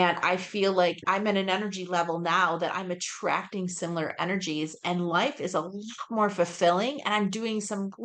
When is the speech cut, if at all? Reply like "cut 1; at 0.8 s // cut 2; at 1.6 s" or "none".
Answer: cut 1; at 1.0 s